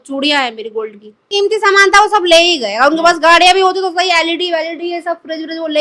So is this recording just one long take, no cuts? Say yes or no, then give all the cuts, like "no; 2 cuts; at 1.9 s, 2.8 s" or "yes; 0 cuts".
no; 1 cut; at 1.2 s